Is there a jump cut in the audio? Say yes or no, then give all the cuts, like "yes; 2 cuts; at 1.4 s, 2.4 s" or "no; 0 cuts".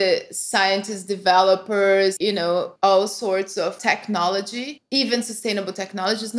no; 0 cuts